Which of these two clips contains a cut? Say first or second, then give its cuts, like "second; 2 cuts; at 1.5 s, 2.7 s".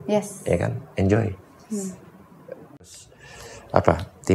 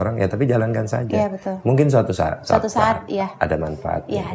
first; 1 cut; at 3.0 s